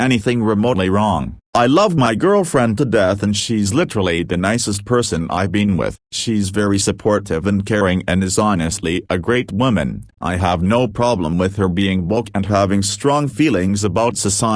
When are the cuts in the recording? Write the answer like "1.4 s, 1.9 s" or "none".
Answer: 1.4 s, 6.0 s